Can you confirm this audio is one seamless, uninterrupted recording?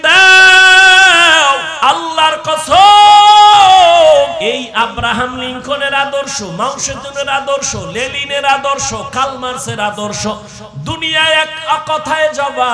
no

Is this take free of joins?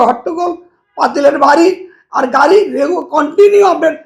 yes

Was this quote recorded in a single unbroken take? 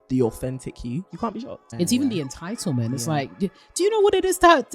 no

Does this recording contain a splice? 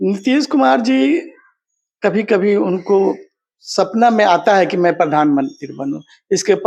no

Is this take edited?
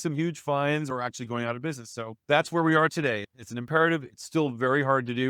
yes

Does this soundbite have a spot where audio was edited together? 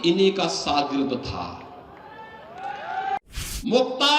yes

